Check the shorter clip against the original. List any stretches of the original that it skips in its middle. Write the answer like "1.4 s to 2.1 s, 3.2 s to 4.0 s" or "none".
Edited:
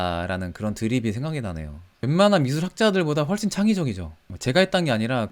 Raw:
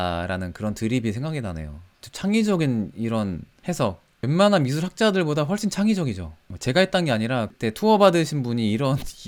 1.9 s to 4.1 s